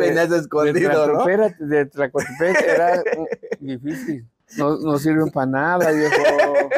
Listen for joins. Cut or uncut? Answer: cut